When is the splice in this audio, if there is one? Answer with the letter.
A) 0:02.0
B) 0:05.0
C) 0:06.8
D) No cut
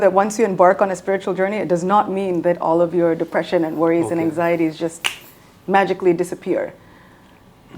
D